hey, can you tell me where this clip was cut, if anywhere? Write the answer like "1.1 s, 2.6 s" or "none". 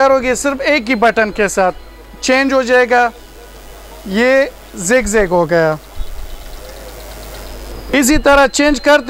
7.9 s